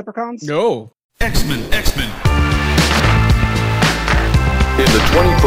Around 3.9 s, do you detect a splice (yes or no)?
no